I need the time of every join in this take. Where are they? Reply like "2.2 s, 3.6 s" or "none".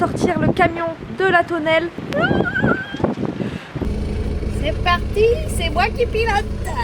2.0 s, 3.9 s

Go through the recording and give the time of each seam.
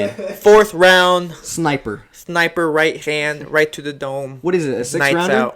none

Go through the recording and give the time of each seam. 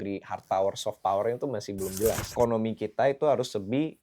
2.3 s

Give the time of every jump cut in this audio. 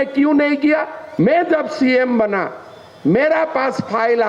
1.0 s

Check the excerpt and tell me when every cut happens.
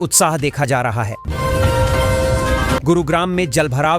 1.2 s, 2.8 s

